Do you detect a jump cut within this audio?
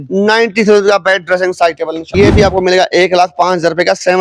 yes; 1 cut; at 2.1 s

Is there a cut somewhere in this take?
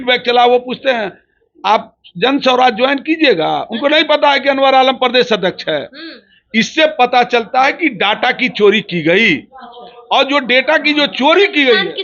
no; 0 cuts

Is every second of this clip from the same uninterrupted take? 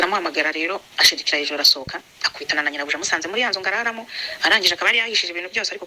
yes; 0 cuts

